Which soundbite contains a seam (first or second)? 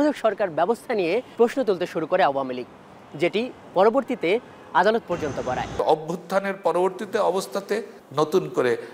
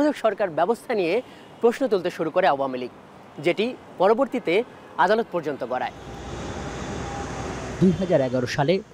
first